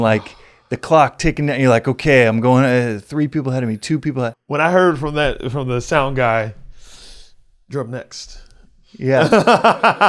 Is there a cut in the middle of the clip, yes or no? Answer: yes